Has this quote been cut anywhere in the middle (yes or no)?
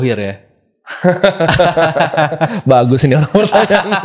no